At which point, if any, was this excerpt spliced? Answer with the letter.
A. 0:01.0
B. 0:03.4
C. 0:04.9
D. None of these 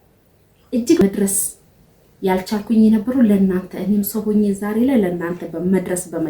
A